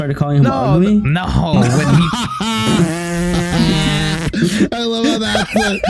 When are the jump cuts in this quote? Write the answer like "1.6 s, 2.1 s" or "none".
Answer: none

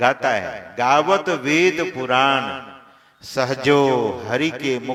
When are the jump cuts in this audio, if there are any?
none

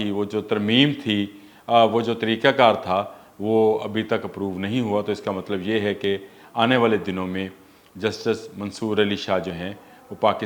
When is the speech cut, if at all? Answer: none

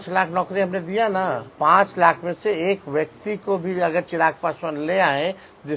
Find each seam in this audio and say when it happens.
1.5 s

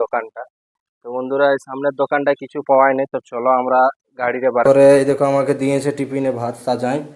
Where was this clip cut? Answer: 4.6 s

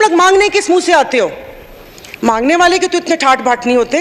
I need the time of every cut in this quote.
none

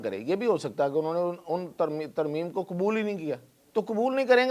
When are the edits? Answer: 3.5 s

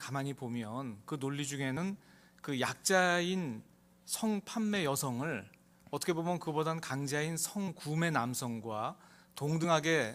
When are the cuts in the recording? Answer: none

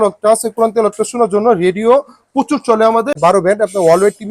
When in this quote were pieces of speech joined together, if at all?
3.1 s

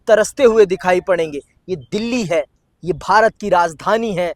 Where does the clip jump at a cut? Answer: none

